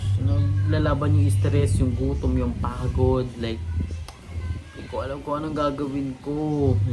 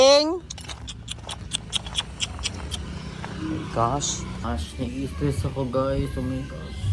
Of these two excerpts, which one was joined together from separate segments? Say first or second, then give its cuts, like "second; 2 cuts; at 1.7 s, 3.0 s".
second; 1 cut; at 4.4 s